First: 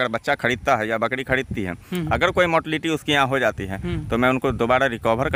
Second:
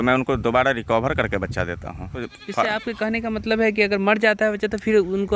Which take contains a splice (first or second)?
second